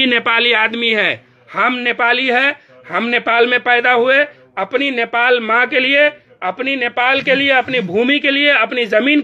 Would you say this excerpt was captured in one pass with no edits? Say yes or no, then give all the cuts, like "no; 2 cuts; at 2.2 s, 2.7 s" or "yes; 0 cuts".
yes; 0 cuts